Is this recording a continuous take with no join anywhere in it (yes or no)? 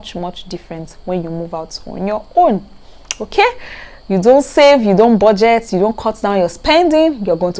yes